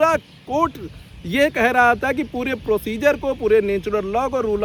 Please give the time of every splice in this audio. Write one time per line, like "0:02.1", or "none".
none